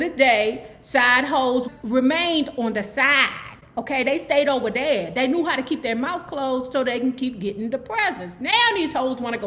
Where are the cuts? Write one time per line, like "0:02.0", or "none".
0:01.7